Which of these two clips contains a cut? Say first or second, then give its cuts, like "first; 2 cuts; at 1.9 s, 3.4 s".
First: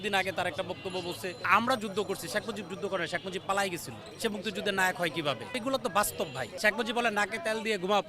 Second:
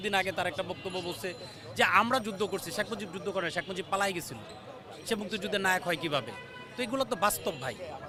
first; 4 cuts; at 1.5 s, 4.0 s, 5.5 s, 6.4 s